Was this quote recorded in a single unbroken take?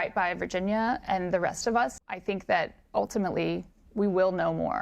no; 1 cut; at 2.0 s

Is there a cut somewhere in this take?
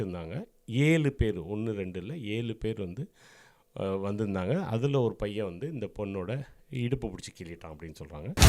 no; 0 cuts

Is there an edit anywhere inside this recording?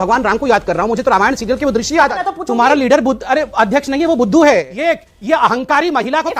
yes; 2 cuts; at 2.2 s, 4.7 s

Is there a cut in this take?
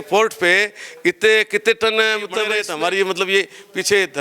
yes; 1 cut; at 2.6 s

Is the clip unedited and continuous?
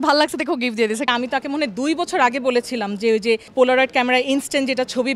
no; 2 cuts; at 1.1 s, 3.5 s

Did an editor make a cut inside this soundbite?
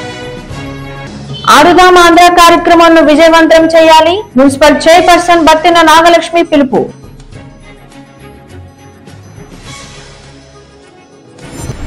no; 0 cuts

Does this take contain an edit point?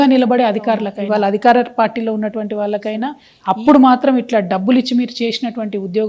yes; 2 cuts; at 0.9 s, 3.3 s

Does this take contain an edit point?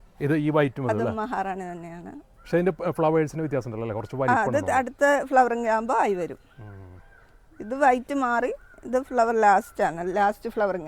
no; 0 cuts

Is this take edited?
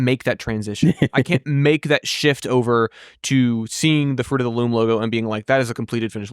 no; 0 cuts

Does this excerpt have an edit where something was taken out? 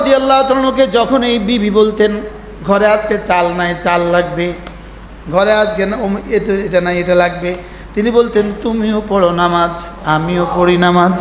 no; 0 cuts

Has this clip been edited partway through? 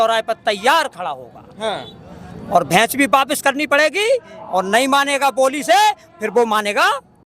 no; 0 cuts

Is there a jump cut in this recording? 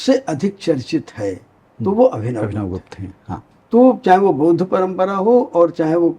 yes; 1 cut; at 3.5 s

